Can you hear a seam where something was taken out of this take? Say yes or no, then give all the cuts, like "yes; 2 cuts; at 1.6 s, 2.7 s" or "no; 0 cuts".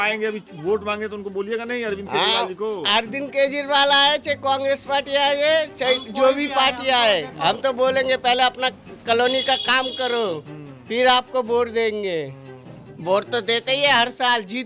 no; 0 cuts